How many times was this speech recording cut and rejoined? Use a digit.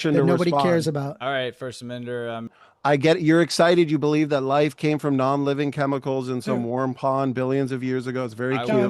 1